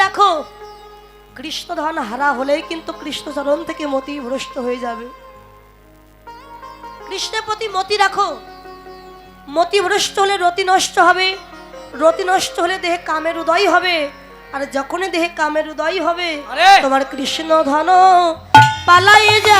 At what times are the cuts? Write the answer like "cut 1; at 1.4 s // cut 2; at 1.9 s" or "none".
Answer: none